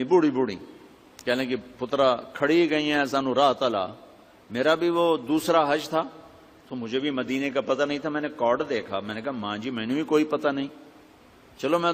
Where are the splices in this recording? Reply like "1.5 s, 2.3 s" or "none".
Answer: 8.6 s